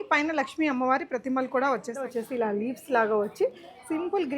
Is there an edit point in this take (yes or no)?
yes